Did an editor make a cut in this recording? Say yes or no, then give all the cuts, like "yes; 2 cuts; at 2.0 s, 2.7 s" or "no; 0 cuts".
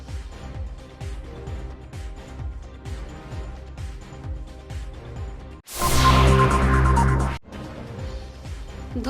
yes; 1 cut; at 7.4 s